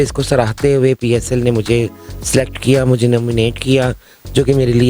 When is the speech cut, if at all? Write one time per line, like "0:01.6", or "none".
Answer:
none